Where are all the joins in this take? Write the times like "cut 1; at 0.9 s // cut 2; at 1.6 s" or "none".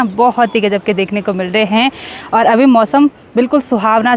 none